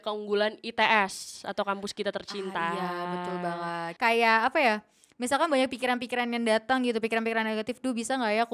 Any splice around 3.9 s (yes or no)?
yes